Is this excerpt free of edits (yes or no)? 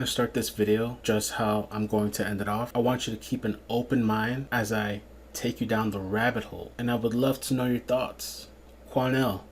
no